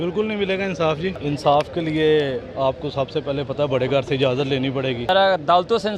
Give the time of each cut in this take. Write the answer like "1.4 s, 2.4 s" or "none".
1.2 s, 5.1 s